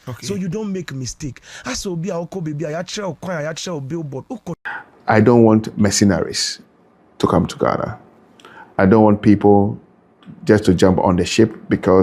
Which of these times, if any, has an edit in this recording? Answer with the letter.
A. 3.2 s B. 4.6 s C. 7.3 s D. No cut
B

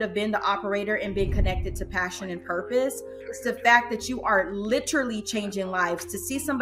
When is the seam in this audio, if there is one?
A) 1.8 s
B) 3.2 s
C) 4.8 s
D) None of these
B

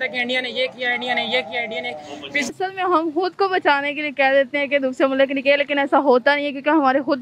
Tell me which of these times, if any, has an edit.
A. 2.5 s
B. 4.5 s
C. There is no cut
A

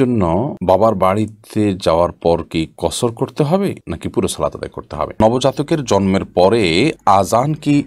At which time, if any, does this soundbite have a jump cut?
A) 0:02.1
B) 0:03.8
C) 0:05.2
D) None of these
C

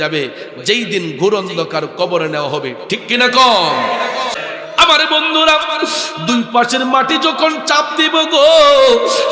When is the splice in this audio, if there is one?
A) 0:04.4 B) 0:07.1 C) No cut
A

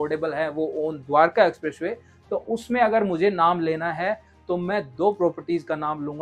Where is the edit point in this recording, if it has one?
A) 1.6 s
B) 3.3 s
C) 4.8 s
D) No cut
D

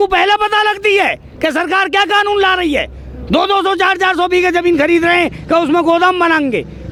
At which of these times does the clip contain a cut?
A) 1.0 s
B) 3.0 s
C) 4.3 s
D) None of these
D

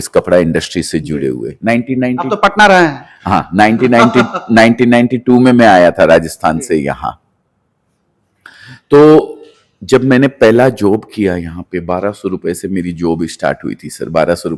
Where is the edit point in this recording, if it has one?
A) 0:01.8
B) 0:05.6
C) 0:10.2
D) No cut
D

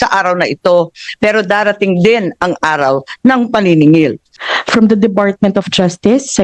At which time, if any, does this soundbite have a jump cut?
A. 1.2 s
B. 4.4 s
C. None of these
B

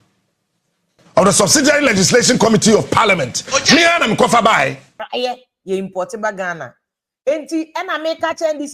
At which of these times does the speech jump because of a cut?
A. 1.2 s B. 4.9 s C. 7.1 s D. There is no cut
B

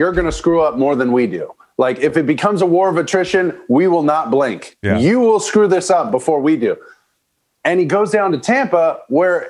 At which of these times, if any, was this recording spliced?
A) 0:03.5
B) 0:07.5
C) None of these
C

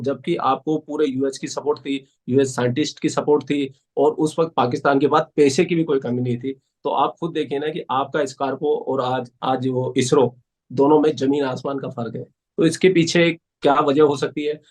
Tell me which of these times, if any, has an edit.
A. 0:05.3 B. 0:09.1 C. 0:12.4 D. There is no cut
D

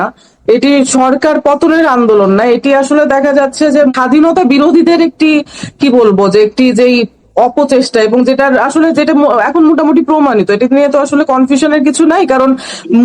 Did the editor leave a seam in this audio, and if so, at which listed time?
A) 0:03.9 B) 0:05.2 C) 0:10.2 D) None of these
A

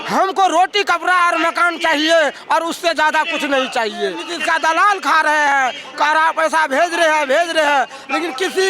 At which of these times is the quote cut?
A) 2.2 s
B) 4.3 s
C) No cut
B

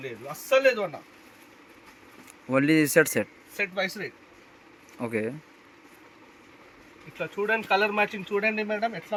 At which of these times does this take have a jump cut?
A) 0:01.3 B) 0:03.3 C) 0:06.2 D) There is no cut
D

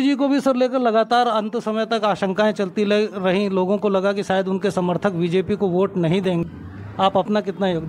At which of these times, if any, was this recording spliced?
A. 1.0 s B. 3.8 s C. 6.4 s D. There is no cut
C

